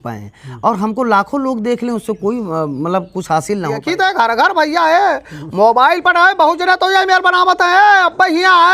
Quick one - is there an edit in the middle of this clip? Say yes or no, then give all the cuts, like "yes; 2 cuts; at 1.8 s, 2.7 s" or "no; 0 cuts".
yes; 1 cut; at 3.8 s